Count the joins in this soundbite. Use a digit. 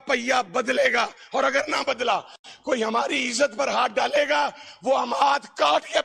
0